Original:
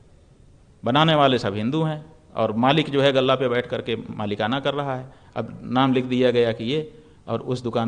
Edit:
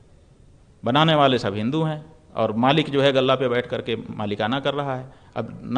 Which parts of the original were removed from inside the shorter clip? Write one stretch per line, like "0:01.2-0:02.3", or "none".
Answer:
none